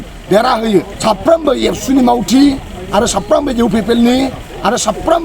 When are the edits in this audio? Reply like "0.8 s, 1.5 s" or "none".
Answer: 0.9 s